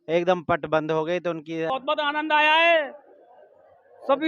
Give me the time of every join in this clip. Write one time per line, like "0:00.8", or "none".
0:01.7